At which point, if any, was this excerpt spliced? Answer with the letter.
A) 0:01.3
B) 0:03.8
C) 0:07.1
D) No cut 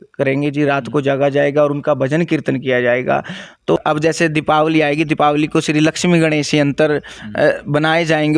B